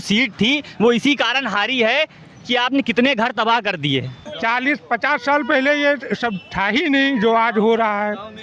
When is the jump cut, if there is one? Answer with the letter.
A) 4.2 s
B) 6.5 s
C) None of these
A